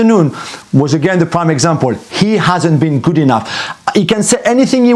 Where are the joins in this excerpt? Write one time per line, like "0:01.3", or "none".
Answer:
none